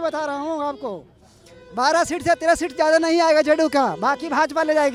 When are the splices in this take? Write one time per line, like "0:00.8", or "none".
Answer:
none